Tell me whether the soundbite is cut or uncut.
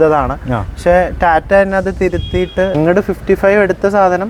cut